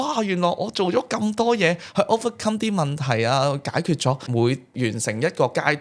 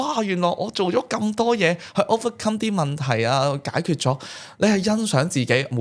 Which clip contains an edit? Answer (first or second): first